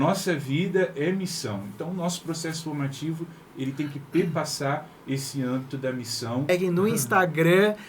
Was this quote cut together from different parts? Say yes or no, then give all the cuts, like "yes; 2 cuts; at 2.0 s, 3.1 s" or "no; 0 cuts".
yes; 1 cut; at 6.5 s